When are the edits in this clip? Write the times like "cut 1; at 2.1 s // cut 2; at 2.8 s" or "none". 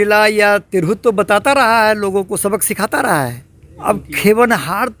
cut 1; at 3.8 s